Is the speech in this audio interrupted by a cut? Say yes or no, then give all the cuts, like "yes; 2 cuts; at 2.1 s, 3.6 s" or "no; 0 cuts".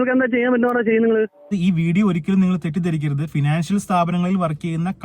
yes; 1 cut; at 1.5 s